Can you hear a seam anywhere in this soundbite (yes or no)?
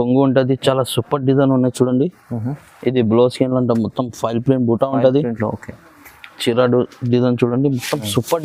no